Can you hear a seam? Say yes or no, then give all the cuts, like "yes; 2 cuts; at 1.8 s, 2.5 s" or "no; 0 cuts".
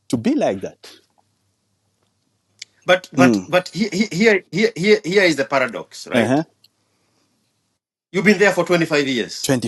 no; 0 cuts